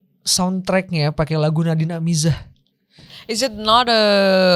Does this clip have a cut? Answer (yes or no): no